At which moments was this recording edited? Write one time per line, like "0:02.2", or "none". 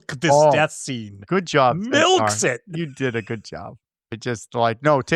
0:04.2